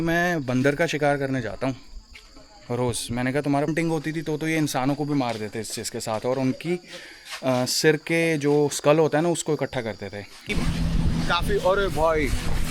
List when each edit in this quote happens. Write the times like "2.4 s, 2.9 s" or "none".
3.7 s, 10.5 s